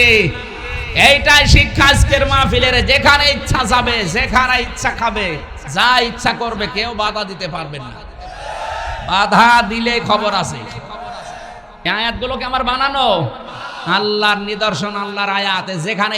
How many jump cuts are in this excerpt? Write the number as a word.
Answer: one